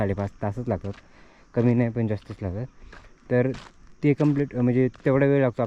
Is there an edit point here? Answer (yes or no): no